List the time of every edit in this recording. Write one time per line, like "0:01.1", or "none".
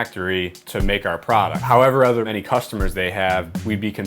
0:01.6
0:02.3